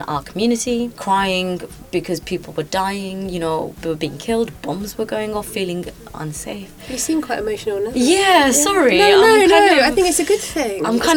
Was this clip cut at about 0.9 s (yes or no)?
yes